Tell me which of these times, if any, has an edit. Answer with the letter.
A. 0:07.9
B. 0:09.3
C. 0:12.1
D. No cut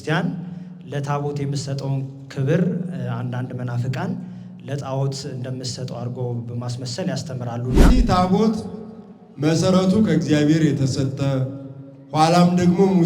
A